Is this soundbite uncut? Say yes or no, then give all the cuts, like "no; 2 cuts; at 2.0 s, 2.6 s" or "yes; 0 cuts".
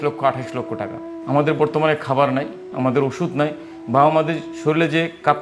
no; 1 cut; at 1.2 s